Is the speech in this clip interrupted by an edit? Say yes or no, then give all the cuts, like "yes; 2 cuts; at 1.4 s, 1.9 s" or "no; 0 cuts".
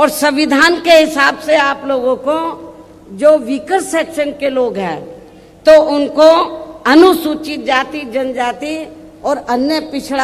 no; 0 cuts